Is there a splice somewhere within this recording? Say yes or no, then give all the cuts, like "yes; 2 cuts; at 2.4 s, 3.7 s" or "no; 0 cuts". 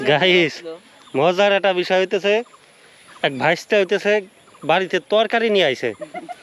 no; 0 cuts